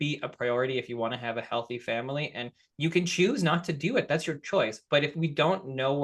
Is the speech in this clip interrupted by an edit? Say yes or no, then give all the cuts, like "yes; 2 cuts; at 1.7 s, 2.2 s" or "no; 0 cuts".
no; 0 cuts